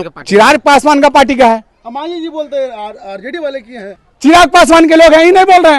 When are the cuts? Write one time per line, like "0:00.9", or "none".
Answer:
0:01.8
0:04.0